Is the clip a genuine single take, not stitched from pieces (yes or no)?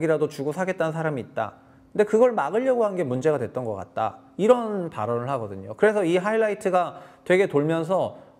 yes